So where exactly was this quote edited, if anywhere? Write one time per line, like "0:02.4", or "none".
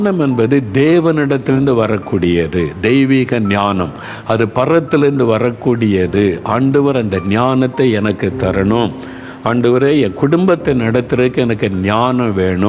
none